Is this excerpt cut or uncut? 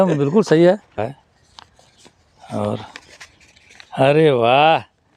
cut